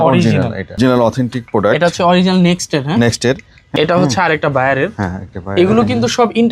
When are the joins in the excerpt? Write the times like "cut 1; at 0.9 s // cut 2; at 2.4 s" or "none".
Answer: cut 1; at 0.8 s // cut 2; at 3.5 s